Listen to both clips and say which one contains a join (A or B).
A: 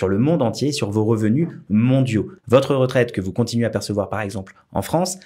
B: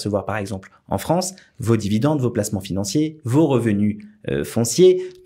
A